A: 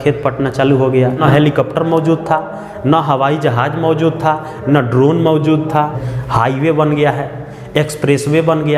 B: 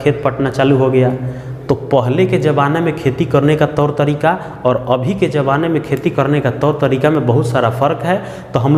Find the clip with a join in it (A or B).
A